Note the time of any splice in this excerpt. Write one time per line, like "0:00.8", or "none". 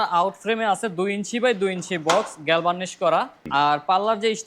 0:03.4